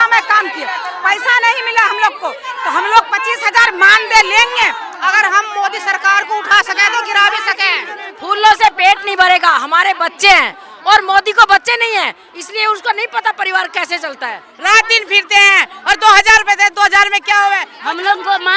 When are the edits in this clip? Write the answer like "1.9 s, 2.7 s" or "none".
4.9 s, 8.1 s, 14.5 s, 17.7 s